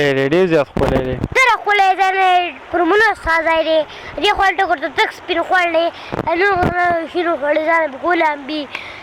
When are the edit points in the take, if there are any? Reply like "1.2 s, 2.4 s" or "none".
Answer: 1.3 s